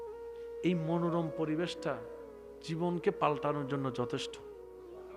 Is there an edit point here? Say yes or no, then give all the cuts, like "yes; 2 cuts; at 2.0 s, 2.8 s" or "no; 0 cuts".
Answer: yes; 1 cut; at 4.2 s